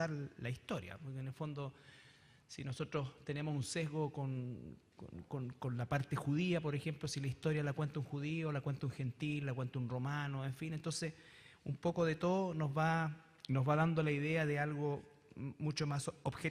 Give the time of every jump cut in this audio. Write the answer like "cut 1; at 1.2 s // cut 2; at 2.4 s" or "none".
cut 1; at 12.4 s